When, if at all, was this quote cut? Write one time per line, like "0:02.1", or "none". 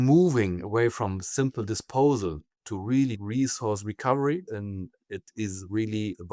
0:03.2
0:04.5